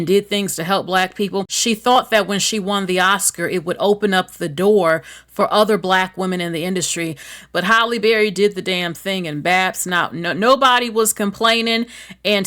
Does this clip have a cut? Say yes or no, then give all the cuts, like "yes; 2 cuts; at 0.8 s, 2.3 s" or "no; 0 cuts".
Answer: yes; 2 cuts; at 1.5 s, 7.3 s